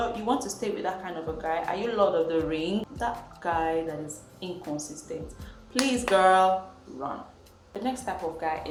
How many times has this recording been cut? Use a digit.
0